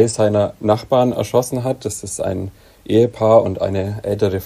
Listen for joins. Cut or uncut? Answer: uncut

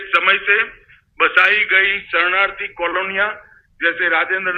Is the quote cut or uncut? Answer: uncut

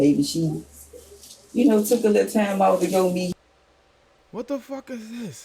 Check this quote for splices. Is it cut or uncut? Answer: cut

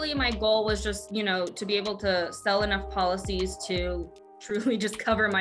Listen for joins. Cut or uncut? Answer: uncut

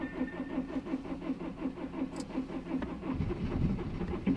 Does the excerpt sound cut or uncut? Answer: uncut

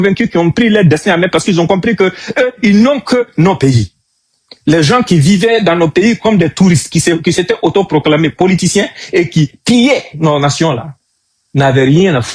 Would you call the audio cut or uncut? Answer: uncut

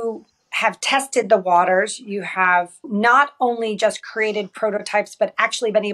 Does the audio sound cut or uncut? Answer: uncut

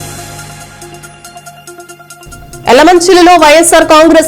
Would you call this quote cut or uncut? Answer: uncut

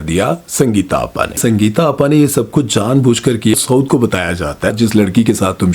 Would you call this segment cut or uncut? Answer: cut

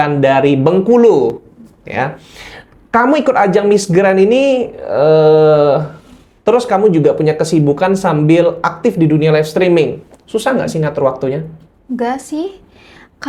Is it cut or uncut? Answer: uncut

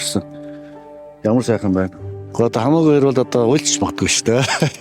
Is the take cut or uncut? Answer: cut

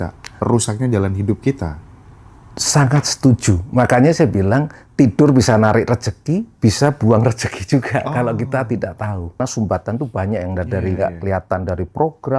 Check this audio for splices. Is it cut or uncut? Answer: cut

